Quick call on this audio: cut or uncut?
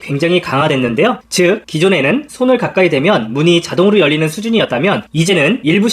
uncut